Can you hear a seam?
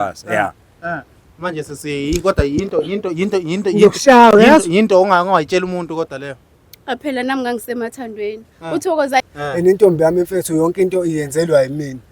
yes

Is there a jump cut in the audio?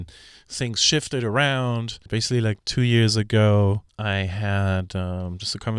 yes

